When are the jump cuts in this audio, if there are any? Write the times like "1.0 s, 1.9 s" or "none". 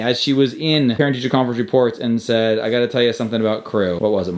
1.0 s